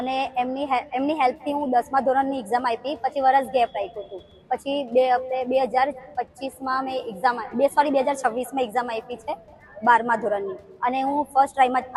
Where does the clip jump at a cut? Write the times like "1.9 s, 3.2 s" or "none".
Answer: none